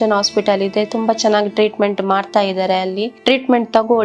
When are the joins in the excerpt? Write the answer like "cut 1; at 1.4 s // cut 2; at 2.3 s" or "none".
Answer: cut 1; at 3.1 s